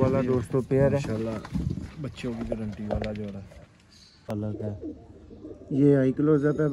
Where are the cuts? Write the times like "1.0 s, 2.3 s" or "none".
4.3 s